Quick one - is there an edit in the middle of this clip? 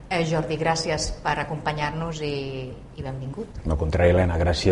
no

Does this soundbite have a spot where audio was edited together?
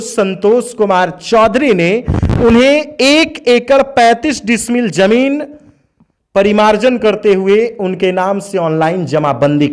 no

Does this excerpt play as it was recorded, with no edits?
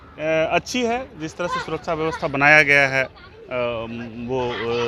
yes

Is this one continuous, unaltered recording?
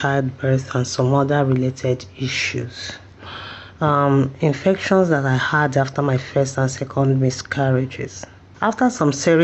yes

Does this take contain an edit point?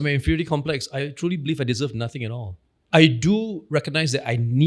yes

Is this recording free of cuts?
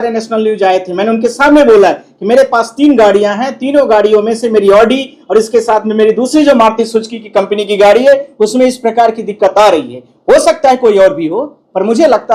yes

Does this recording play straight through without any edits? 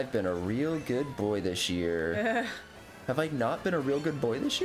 no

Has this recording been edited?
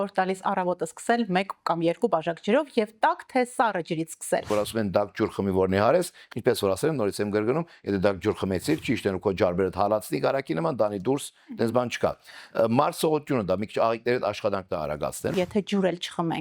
yes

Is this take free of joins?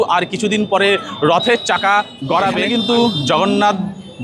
no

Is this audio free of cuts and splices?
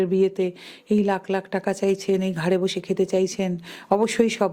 yes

